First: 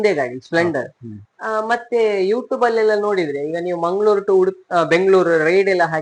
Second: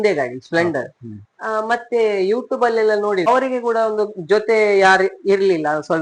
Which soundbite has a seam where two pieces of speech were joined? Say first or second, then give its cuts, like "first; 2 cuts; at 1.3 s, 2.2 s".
second; 1 cut; at 3.3 s